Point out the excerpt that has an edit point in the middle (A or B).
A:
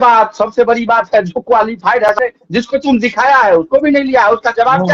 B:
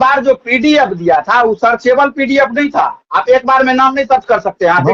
A